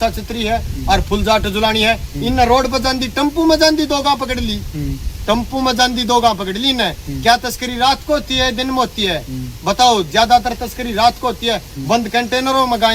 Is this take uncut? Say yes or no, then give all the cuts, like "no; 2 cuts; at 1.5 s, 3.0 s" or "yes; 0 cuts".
yes; 0 cuts